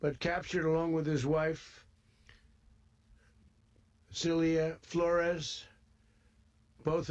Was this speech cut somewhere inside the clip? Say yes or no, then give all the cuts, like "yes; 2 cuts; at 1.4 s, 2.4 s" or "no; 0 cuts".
no; 0 cuts